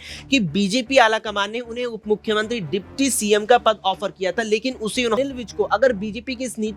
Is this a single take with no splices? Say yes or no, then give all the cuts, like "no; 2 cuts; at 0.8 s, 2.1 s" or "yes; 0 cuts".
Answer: no; 1 cut; at 5.2 s